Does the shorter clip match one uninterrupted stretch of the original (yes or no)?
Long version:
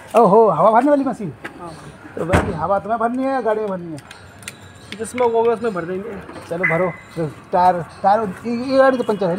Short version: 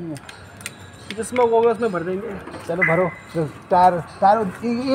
yes